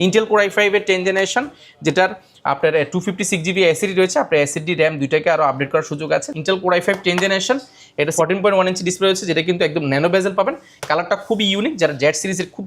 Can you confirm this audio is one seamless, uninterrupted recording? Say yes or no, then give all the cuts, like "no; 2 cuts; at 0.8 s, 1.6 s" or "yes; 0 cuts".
no; 2 cuts; at 6.3 s, 8.1 s